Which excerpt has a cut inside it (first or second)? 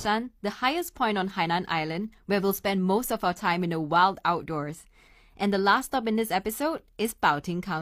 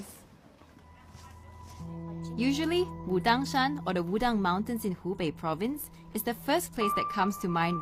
first